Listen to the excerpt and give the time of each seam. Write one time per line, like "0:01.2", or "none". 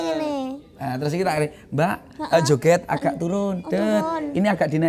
none

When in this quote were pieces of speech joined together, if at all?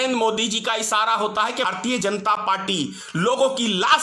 0:01.6

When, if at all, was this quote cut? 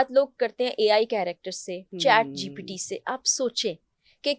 none

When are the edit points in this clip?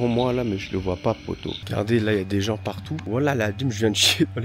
0:01.6
0:02.9

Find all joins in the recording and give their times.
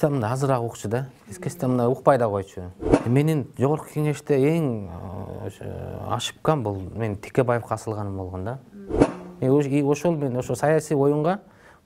0:02.9
0:08.9

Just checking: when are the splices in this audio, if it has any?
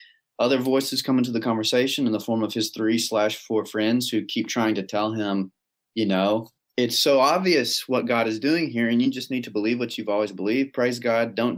0:06.6

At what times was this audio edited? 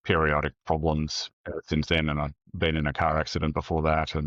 none

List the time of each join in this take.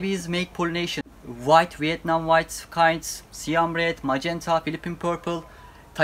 0:00.9

